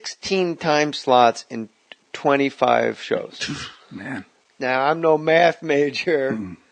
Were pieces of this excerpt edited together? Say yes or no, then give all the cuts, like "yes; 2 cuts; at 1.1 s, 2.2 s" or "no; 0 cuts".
yes; 1 cut; at 1.8 s